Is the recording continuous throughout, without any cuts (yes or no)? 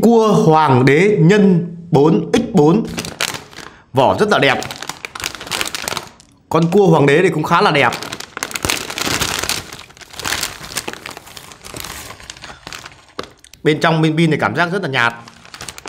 yes